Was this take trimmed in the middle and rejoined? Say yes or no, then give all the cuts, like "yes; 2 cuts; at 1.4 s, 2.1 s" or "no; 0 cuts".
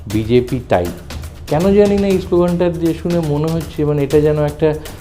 yes; 1 cut; at 1.3 s